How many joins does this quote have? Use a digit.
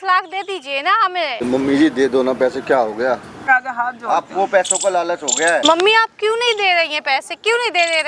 3